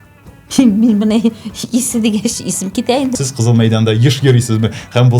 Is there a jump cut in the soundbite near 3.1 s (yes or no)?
yes